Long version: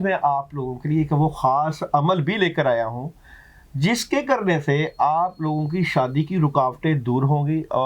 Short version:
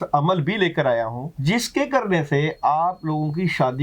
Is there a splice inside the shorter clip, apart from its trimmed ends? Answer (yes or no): yes